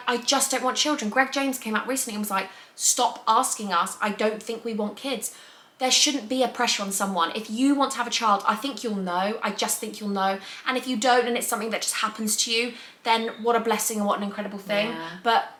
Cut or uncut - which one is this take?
uncut